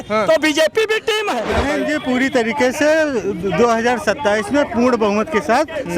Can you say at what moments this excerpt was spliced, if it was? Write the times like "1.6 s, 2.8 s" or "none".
1.5 s